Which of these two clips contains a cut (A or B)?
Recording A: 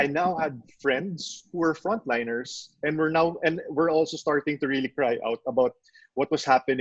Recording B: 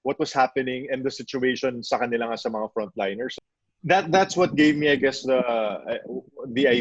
B